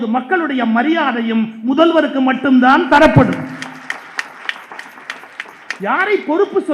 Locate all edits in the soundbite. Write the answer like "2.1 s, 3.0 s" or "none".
none